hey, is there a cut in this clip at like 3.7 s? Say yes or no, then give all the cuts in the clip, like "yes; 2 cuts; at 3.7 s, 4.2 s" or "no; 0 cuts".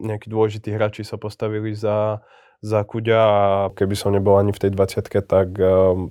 yes; 1 cut; at 3.7 s